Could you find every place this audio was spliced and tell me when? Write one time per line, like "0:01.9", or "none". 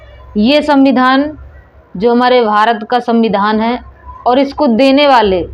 none